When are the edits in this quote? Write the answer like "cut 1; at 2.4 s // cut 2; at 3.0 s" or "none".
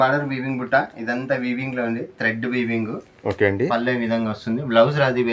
none

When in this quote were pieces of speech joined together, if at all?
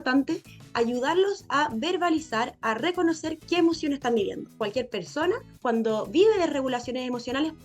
cut 1; at 4.6 s

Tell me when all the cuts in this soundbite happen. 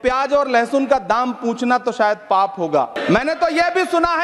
cut 1; at 3.0 s

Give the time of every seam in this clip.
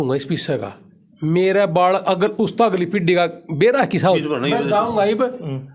cut 1; at 4.2 s

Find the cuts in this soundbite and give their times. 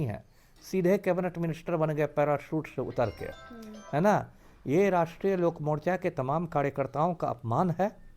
none

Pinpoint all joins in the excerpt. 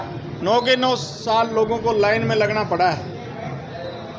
none

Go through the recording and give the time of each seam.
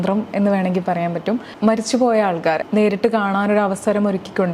cut 1; at 1.5 s // cut 2; at 2.6 s

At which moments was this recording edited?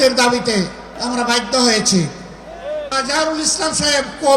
cut 1; at 0.9 s // cut 2; at 2.9 s

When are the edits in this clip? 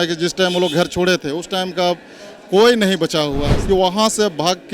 cut 1; at 3.5 s

